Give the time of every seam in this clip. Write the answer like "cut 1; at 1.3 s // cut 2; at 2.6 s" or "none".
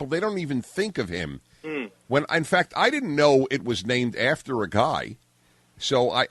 none